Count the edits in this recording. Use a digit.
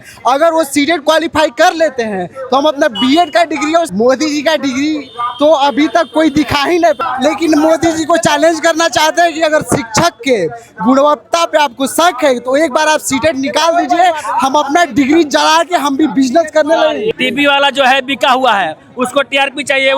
3